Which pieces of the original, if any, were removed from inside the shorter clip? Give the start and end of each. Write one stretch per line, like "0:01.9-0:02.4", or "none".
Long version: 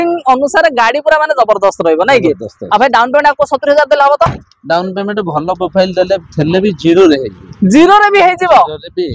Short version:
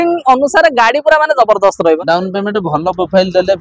0:02.0-0:04.6